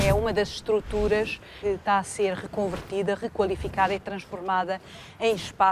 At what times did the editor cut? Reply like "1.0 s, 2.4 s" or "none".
none